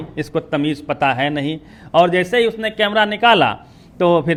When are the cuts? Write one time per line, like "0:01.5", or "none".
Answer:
none